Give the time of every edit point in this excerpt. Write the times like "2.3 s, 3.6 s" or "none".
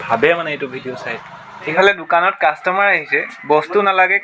1.7 s